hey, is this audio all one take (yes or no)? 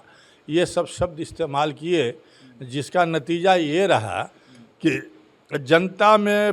yes